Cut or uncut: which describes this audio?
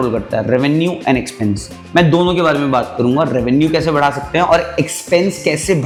uncut